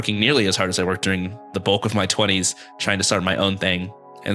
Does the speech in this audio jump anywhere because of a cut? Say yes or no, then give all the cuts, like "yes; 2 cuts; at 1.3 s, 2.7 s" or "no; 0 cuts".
yes; 1 cut; at 1.5 s